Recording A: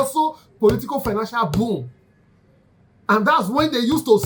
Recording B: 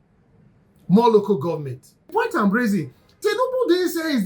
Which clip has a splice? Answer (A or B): B